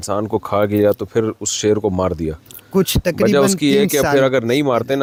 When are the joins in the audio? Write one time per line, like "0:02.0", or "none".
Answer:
none